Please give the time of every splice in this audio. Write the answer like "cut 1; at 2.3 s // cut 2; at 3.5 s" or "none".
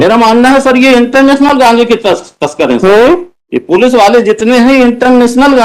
none